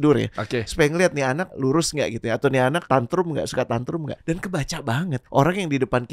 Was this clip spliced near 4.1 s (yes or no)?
yes